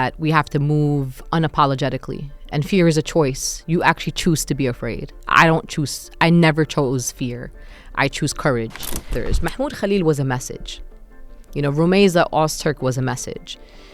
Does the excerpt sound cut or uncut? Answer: cut